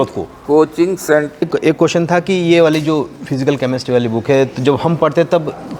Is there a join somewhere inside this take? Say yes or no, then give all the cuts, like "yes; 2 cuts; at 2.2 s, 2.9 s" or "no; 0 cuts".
yes; 1 cut; at 1.4 s